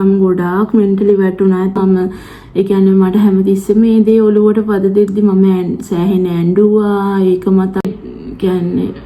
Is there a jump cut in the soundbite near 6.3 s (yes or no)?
no